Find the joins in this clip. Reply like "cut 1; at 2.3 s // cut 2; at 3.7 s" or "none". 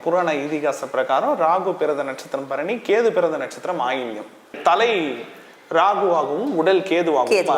cut 1; at 4.6 s